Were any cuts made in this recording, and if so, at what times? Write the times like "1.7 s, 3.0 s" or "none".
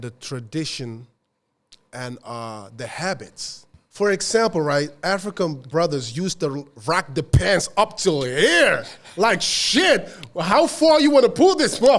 3.8 s